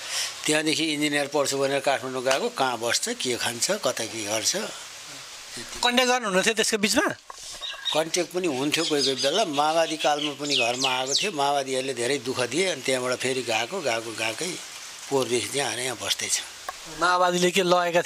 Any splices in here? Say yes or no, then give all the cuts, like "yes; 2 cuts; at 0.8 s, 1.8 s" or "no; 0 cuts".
no; 0 cuts